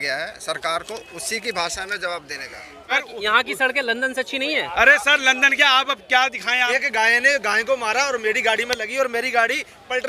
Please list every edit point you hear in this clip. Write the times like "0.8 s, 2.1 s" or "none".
2.9 s, 6.7 s